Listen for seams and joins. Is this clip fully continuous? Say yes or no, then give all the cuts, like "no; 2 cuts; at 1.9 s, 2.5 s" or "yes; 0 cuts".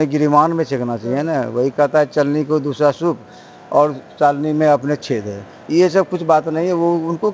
yes; 0 cuts